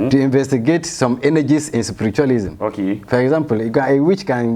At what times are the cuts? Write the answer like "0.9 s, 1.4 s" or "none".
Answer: none